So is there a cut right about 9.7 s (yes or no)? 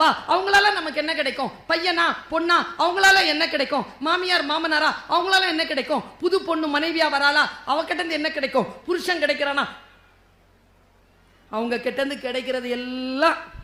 no